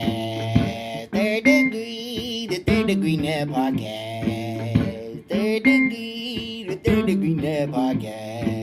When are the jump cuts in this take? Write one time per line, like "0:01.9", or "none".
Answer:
none